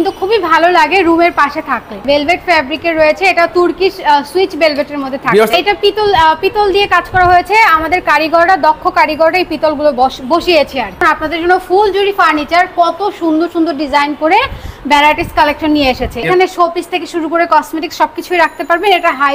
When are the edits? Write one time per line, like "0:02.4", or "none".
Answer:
0:02.0
0:05.5
0:11.0
0:16.3